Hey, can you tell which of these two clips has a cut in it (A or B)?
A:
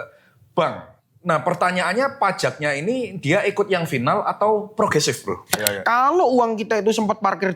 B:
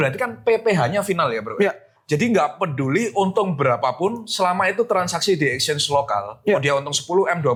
A